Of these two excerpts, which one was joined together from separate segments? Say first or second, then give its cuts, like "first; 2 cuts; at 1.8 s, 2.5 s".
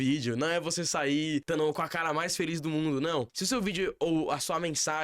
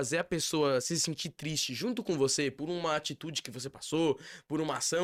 first; 2 cuts; at 1.4 s, 3.4 s